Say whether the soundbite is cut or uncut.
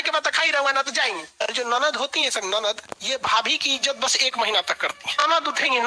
cut